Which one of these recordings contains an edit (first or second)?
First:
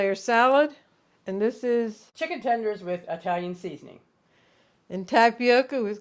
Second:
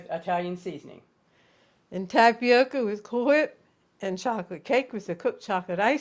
first